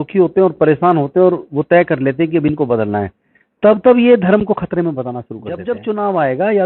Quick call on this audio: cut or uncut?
cut